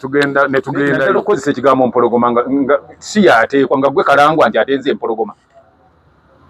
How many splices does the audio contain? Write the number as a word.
one